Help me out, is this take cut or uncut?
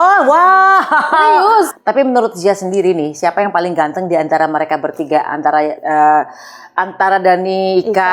cut